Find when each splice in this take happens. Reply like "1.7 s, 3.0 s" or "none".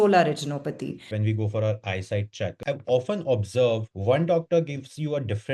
1.1 s, 2.6 s, 3.9 s